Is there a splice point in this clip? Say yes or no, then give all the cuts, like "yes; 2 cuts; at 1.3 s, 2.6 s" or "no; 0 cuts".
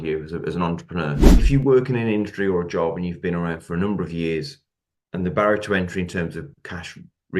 yes; 1 cut; at 1.4 s